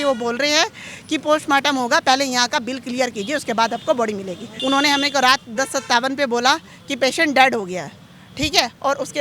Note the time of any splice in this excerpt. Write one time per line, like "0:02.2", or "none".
0:04.5